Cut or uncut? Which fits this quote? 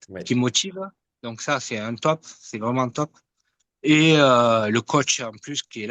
uncut